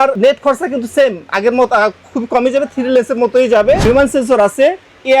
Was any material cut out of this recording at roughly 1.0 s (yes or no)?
no